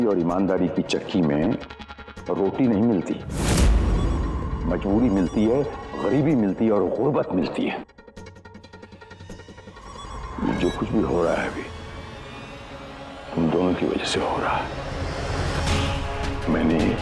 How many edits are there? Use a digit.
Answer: 0